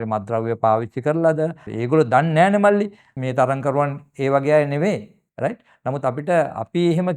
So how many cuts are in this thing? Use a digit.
2